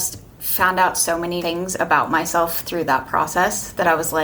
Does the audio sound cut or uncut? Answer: cut